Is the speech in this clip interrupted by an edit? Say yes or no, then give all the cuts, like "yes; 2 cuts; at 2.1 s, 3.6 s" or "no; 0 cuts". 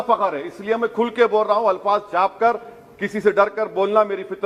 no; 0 cuts